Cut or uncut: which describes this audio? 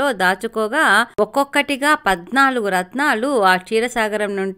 uncut